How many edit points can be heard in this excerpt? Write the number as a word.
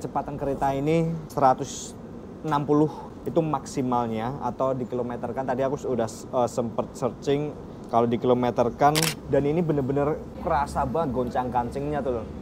four